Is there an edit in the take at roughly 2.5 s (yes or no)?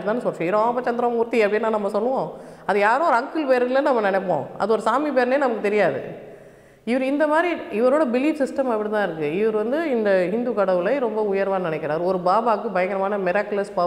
no